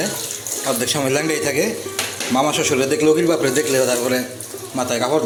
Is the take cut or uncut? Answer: uncut